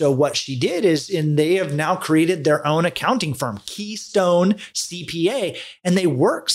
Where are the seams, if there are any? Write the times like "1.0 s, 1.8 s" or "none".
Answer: none